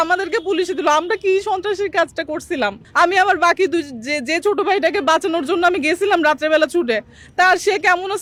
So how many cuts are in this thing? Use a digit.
0